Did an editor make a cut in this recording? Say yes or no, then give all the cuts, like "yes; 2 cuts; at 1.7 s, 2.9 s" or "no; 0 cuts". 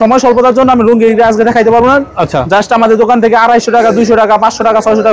no; 0 cuts